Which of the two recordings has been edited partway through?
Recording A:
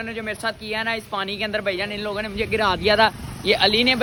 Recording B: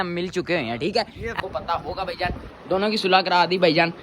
B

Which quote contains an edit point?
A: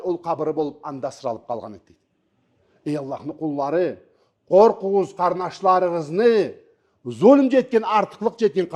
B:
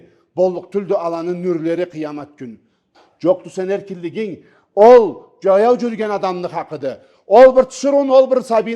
B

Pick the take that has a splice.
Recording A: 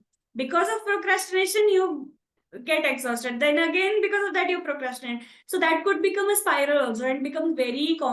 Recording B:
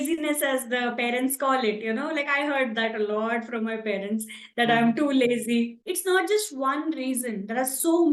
B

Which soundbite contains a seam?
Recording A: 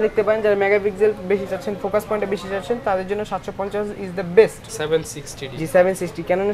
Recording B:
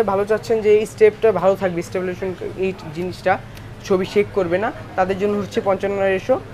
A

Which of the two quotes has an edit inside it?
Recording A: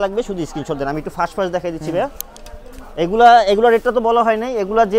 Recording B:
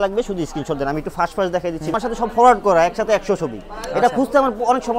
B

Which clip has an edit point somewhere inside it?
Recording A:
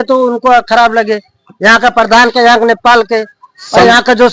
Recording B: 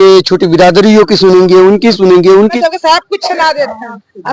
B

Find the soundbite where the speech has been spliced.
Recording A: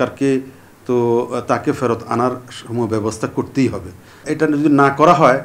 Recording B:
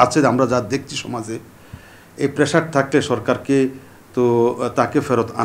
A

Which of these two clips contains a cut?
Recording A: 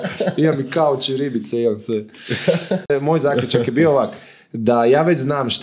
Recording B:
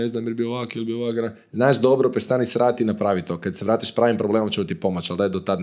A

